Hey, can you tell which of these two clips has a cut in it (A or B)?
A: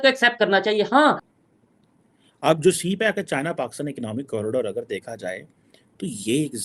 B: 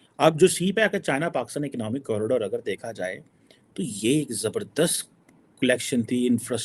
A